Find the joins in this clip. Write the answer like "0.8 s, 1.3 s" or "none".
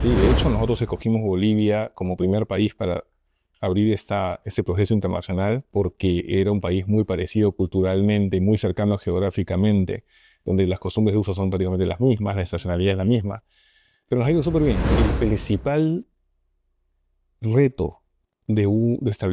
14.8 s